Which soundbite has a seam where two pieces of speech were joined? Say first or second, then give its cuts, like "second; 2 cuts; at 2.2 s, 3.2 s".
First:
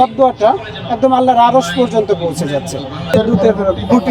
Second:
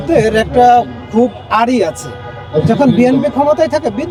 first; 1 cut; at 3.1 s